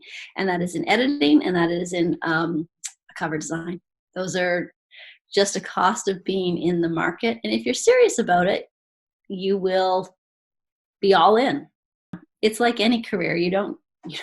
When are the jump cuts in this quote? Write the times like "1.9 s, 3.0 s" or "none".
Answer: 12.2 s

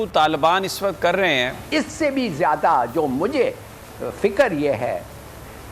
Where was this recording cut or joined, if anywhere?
1.6 s

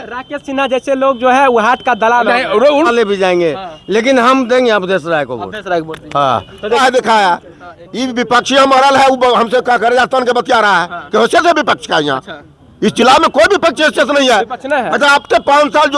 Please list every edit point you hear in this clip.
2.9 s, 6.8 s

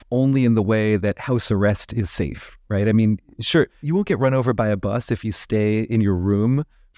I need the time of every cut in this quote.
3.8 s

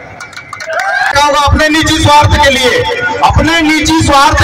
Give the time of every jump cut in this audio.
1.1 s

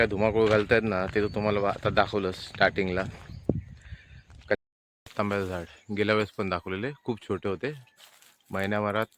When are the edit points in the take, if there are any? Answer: 4.6 s

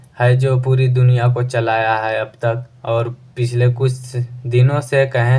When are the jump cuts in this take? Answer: none

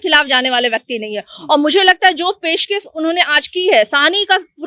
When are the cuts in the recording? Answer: none

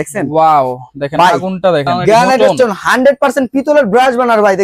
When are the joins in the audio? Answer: 1.9 s

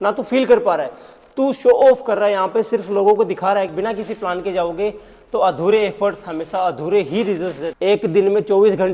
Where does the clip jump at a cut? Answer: 3.7 s, 7.7 s

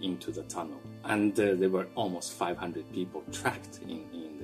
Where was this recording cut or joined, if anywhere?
0.9 s, 1.9 s

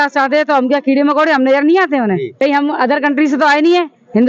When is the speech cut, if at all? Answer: 2.3 s

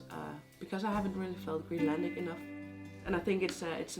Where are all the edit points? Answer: 3.0 s

